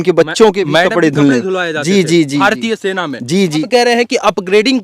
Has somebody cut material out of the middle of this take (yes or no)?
yes